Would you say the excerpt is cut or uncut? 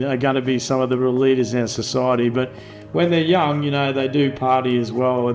uncut